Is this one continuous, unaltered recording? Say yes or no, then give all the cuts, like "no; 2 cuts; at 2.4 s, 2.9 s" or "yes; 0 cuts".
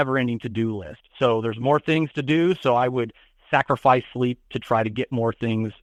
yes; 0 cuts